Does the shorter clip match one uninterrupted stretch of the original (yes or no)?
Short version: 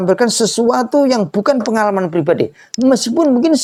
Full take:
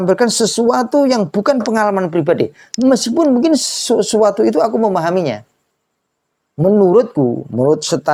yes